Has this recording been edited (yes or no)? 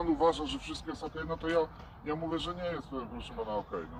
no